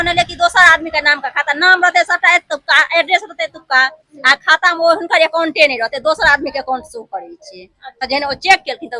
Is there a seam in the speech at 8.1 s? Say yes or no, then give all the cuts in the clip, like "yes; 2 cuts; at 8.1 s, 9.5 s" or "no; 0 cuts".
yes; 1 cut; at 8.1 s